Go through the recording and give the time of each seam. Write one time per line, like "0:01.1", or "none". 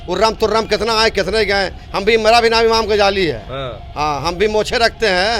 none